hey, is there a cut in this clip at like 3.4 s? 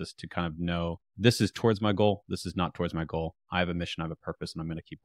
no; 1 cut; at 1.0 s

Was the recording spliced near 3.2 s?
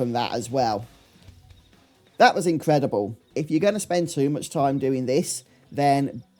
yes; 1 cut; at 3.2 s

